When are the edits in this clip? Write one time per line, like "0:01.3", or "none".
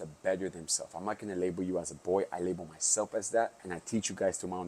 0:03.7